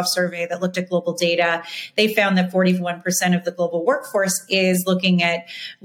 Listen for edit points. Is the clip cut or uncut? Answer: uncut